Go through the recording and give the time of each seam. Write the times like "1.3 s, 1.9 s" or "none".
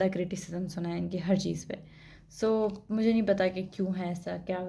none